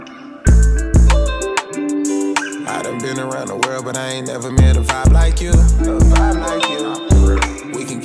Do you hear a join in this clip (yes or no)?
no